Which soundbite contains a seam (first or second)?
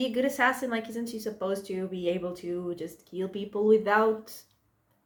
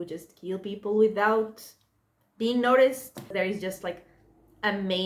second